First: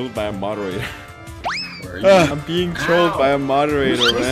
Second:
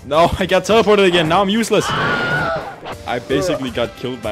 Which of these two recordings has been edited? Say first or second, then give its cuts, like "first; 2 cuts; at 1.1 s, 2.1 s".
first; 2 cuts; at 1.3 s, 2.3 s